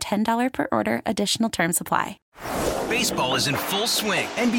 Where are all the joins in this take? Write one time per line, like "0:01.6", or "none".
0:02.2